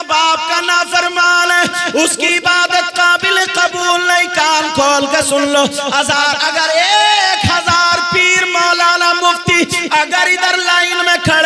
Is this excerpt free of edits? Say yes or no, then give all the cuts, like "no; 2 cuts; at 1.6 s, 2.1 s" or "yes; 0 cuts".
yes; 0 cuts